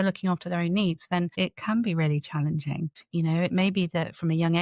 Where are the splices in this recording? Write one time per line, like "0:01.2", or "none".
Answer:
0:01.3
0:02.9

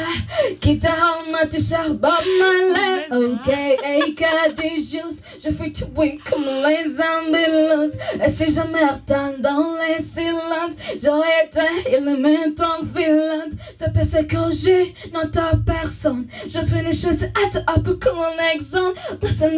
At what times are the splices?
none

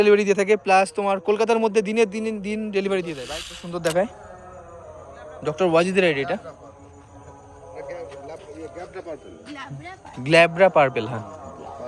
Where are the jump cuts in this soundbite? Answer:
0:03.2

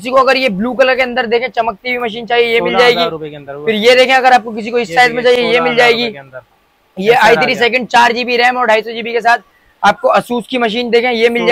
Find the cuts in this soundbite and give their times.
none

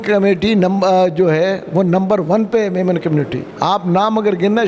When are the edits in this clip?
0:03.4

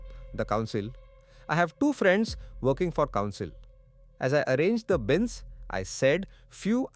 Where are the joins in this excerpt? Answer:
none

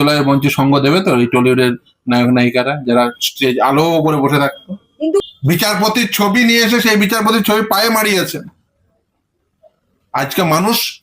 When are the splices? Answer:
0:05.2

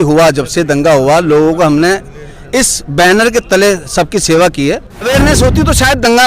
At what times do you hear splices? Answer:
0:04.9

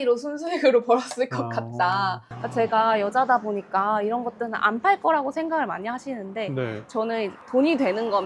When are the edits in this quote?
0:02.3

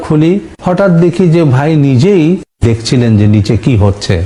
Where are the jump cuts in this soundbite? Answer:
none

